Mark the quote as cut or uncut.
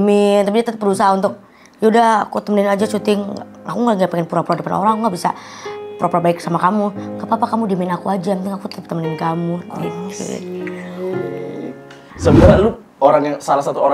cut